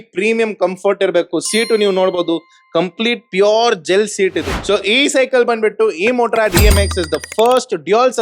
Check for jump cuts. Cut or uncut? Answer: cut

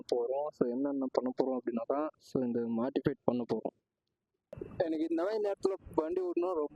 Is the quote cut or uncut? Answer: cut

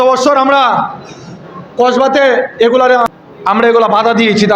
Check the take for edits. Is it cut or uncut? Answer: cut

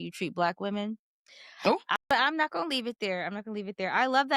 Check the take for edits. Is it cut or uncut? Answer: cut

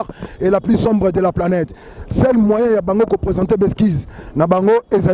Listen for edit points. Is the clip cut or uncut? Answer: uncut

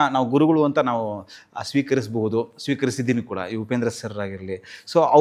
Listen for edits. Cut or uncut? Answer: uncut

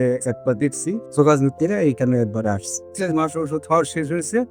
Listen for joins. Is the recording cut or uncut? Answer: cut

